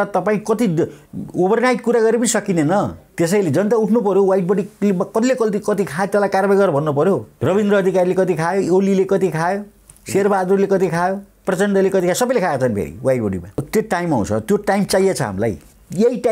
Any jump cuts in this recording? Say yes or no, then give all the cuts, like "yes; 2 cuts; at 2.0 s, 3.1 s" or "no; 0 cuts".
yes; 3 cuts; at 3.0 s, 7.3 s, 13.7 s